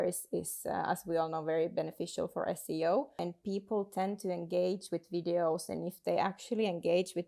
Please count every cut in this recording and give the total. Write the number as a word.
one